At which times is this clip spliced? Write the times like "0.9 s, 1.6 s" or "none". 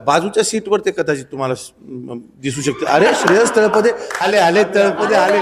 4.1 s